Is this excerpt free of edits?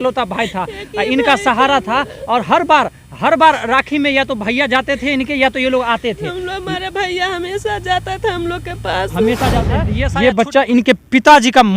no; 1 cut; at 10.0 s

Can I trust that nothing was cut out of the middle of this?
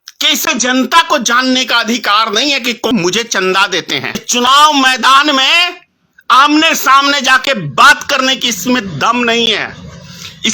no; 2 cuts; at 2.9 s, 4.2 s

